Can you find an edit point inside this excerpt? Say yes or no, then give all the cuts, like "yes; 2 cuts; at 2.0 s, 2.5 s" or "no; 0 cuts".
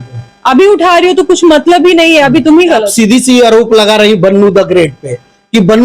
yes; 1 cut; at 2.9 s